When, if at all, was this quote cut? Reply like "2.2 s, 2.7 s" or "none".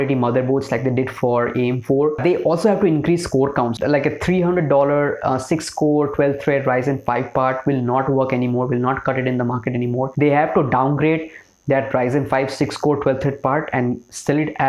2.2 s, 3.7 s, 10.1 s

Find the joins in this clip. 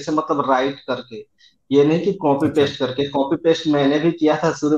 none

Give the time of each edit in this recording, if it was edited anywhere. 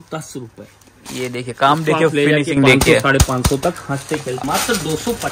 4.4 s

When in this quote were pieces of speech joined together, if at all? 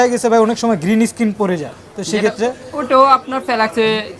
none

